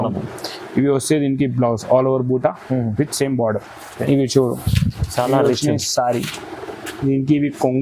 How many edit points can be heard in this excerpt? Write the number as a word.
one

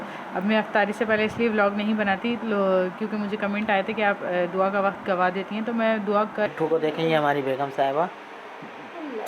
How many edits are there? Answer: one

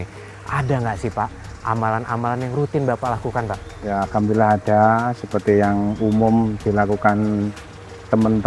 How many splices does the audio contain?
zero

